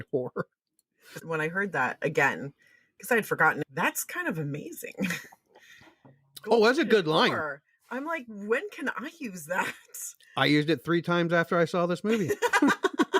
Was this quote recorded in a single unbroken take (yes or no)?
no